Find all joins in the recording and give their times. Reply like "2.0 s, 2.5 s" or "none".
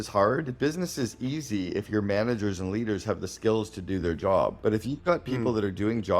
4.6 s